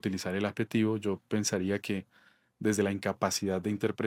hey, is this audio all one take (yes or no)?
yes